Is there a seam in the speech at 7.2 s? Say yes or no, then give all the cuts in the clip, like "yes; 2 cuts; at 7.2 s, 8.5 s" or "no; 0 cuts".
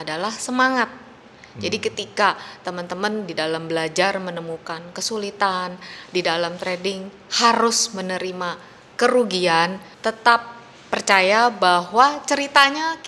no; 1 cut; at 9.9 s